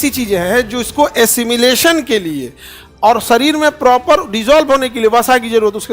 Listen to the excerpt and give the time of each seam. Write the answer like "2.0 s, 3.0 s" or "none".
none